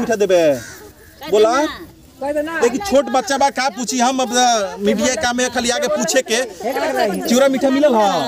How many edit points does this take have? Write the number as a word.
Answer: zero